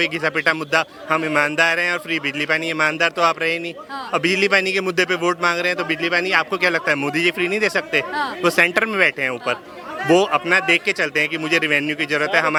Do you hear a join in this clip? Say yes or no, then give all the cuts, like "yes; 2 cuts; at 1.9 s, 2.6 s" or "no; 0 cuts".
no; 0 cuts